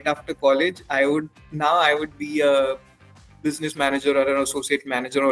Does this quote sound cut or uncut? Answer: uncut